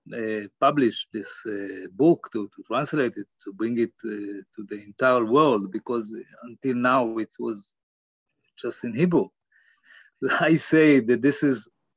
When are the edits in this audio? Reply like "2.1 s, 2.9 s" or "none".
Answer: 10.1 s